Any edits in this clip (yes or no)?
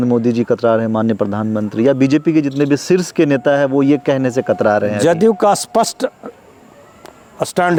no